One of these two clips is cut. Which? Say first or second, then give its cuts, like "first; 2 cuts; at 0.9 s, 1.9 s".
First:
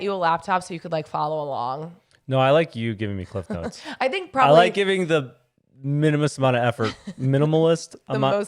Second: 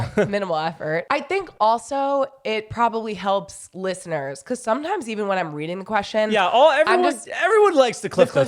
second; 2 cuts; at 1.0 s, 7.3 s